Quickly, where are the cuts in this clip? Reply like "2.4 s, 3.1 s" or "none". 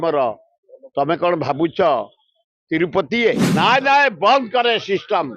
3.4 s